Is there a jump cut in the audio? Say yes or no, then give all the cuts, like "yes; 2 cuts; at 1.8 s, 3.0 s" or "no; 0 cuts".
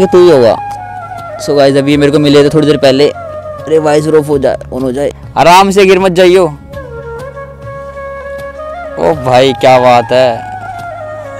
yes; 1 cut; at 5.2 s